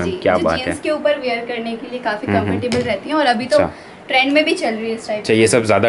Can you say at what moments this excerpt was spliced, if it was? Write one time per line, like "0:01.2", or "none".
none